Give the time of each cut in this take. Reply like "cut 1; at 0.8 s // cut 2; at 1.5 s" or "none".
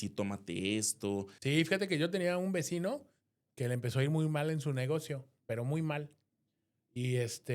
cut 1; at 1.3 s

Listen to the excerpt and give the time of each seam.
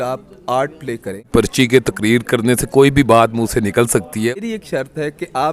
cut 1; at 1.3 s // cut 2; at 4.4 s

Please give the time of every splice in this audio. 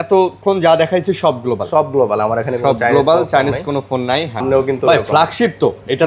cut 1; at 4.4 s

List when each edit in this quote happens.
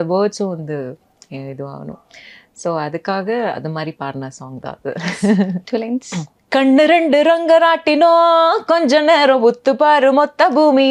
none

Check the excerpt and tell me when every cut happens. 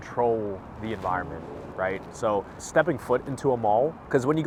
none

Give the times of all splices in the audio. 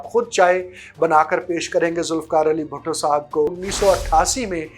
cut 1; at 3.6 s

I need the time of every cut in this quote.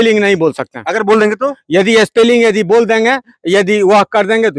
none

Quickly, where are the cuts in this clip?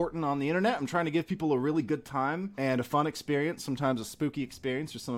cut 1; at 2.5 s

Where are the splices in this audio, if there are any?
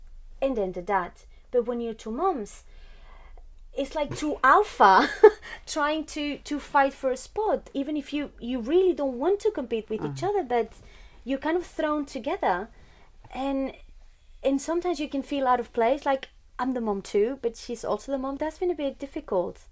cut 1; at 18.4 s

